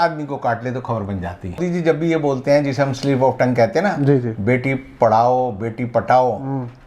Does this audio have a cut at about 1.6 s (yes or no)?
yes